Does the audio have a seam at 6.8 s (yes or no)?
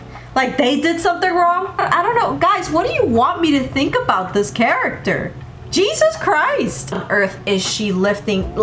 yes